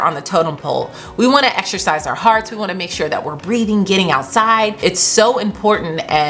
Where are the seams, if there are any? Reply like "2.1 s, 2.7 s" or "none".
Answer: 4.8 s